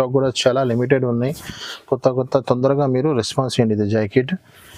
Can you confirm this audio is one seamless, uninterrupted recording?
yes; 0 cuts

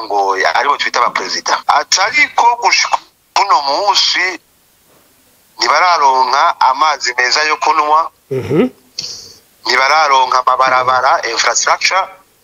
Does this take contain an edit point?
yes; 1 cut; at 1.6 s

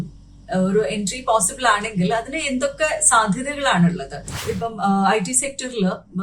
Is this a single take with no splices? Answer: no; 1 cut; at 4.4 s

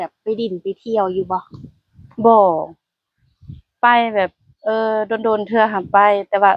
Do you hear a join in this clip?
no; 0 cuts

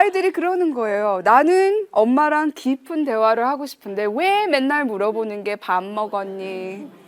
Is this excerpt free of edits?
yes; 0 cuts

